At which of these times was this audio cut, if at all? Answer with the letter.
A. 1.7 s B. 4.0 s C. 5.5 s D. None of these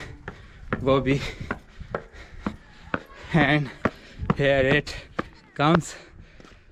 D